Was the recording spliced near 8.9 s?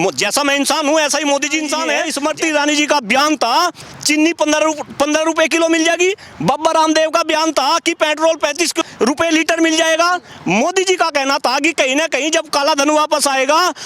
yes; 3 cuts; at 2.1 s, 3.9 s, 8.9 s

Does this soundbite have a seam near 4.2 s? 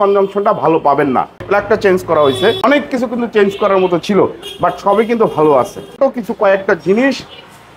no; 3 cuts; at 1.4 s, 2.6 s, 5.9 s

